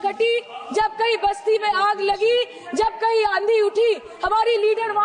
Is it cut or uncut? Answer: uncut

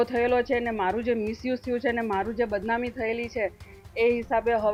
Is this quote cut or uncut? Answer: uncut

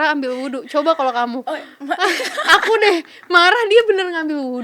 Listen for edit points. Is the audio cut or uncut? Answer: uncut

